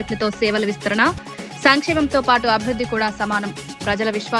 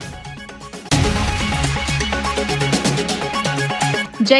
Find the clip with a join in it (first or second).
second